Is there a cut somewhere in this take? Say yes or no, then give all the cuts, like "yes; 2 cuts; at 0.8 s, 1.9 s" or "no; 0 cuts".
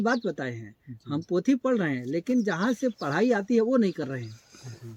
no; 0 cuts